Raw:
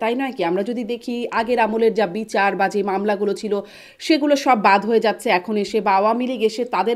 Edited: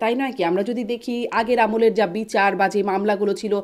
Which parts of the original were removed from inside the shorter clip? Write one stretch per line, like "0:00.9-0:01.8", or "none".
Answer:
none